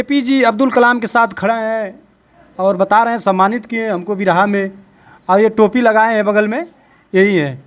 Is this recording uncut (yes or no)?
yes